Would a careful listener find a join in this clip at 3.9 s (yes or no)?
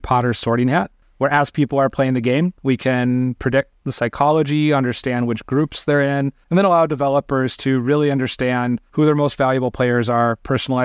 no